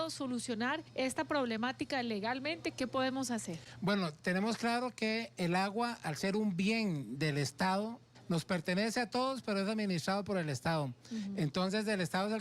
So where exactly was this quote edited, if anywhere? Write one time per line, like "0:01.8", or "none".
0:00.9
0:08.1